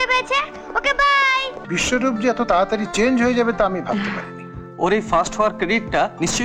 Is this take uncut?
no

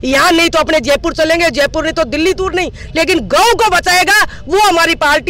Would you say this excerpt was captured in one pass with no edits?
yes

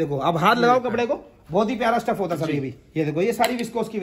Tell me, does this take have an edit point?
no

